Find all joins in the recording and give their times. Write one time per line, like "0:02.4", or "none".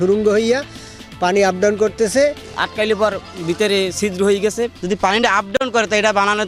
none